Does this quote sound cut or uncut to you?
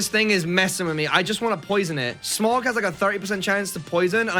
cut